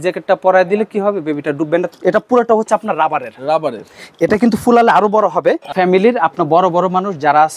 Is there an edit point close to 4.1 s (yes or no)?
no